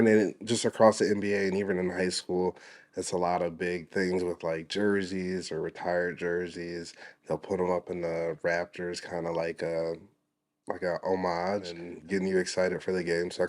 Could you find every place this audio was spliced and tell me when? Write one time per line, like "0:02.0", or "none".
0:11.9